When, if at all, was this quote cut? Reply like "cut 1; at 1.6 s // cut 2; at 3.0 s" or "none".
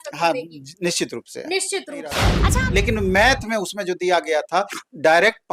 cut 1; at 2.3 s